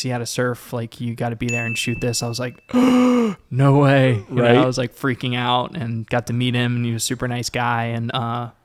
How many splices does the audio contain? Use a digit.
0